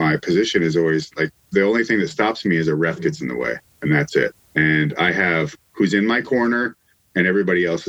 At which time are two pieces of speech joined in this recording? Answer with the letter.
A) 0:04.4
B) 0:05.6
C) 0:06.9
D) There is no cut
A